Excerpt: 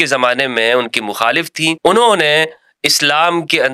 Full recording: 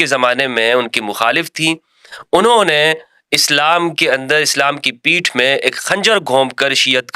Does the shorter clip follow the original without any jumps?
no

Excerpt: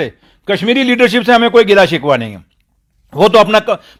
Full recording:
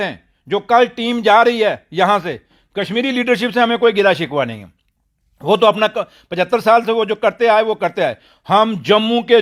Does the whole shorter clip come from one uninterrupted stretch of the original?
yes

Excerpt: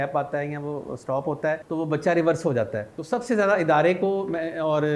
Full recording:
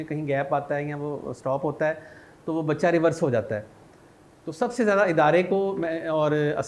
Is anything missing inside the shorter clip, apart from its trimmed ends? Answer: yes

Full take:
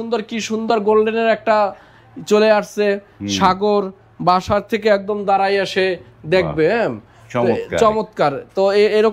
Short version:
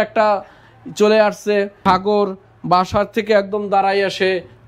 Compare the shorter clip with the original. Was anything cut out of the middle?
yes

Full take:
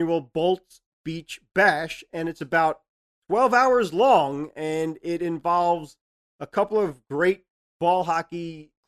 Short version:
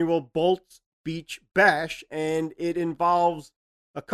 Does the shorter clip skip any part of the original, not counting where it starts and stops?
yes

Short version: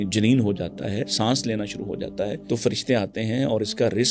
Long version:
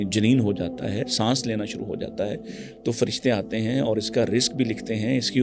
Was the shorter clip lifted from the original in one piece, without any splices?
no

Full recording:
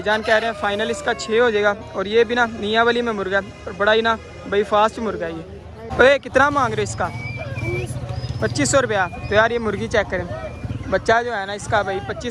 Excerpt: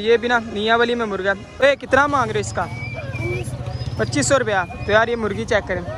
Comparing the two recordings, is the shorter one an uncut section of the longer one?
no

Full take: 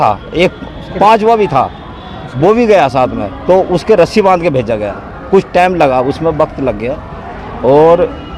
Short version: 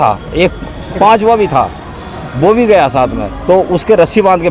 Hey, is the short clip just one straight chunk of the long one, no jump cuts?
yes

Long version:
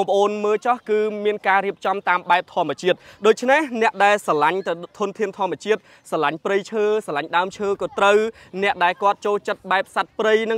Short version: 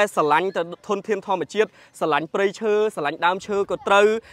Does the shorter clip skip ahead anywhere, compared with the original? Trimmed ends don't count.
no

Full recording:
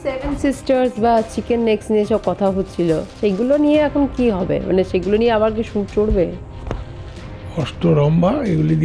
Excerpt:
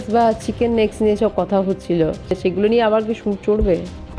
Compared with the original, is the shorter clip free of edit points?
no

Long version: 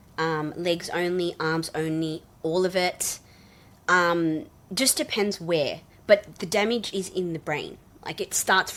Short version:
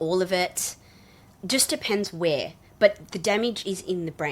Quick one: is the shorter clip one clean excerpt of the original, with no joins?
no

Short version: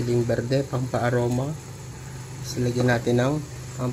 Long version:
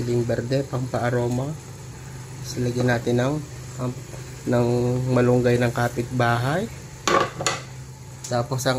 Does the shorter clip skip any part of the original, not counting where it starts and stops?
no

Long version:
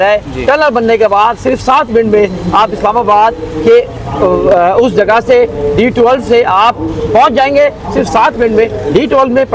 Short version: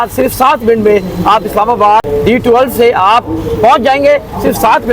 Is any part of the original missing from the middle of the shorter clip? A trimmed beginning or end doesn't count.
yes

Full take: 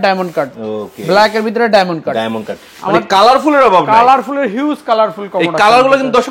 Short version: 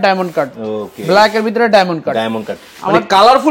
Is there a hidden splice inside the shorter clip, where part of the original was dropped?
no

